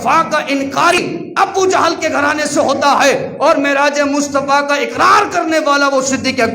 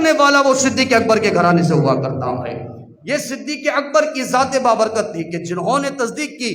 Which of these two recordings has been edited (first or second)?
first